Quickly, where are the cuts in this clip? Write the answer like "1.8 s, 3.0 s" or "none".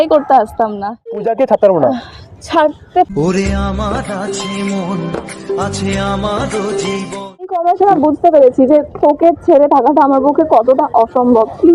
1.2 s, 7.6 s